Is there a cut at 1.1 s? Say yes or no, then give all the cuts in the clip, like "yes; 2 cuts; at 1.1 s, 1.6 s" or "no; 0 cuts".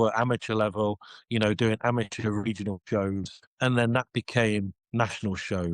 no; 2 cuts; at 3.4 s, 4.8 s